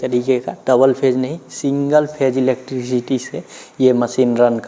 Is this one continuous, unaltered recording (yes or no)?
yes